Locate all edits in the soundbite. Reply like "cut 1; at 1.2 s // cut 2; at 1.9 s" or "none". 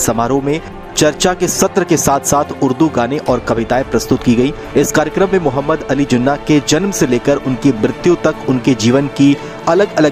none